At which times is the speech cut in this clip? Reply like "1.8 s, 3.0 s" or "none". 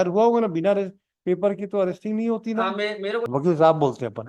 3.3 s